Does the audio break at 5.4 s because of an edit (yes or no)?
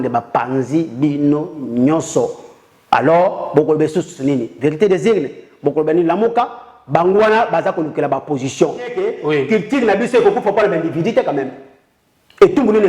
no